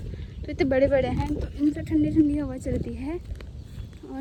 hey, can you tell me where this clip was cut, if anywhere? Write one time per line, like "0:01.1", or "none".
none